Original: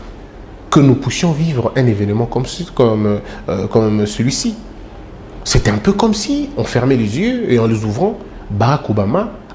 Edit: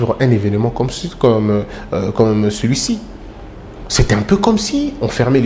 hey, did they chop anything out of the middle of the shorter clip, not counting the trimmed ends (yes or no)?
no